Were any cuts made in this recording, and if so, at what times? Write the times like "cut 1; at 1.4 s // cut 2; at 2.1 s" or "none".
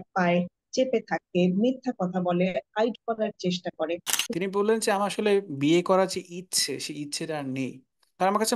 cut 1; at 4.2 s